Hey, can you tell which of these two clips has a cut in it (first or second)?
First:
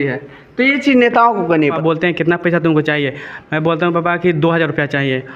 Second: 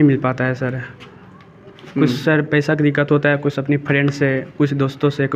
first